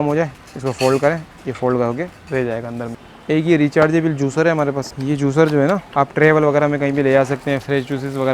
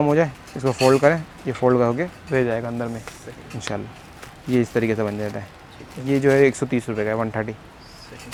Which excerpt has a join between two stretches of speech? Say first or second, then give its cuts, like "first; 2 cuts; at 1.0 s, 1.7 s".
first; 3 cuts; at 3.1 s, 4.9 s, 5.9 s